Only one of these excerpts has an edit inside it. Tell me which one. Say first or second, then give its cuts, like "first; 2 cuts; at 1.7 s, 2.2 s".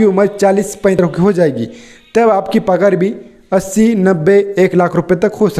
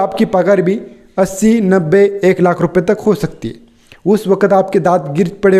first; 1 cut; at 1.0 s